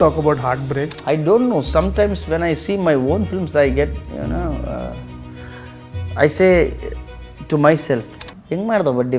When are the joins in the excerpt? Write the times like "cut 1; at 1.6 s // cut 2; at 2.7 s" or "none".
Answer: cut 1; at 0.9 s